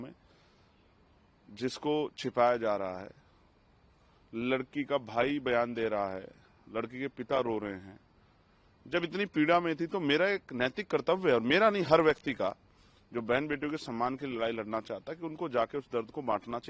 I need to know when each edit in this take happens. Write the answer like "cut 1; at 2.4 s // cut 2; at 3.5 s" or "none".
none